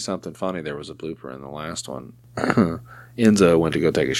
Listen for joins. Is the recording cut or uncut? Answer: cut